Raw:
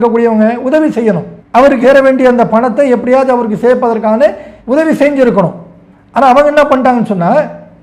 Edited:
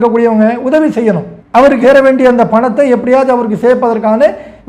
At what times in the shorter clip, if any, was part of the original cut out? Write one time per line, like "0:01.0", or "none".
none